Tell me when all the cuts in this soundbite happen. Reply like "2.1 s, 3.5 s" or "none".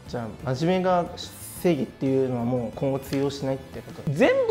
none